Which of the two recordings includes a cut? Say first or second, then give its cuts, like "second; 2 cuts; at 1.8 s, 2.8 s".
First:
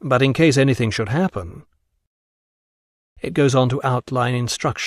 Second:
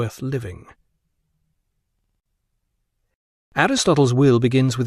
first; 1 cut; at 2.8 s